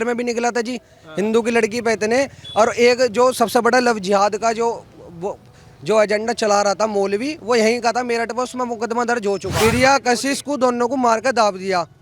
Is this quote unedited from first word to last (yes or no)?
no